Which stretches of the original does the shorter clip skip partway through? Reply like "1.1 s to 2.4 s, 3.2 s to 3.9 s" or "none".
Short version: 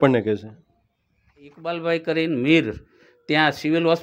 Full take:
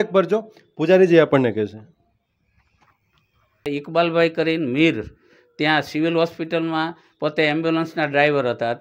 2.9 s to 3.9 s